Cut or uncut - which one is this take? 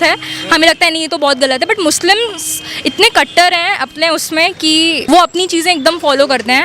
cut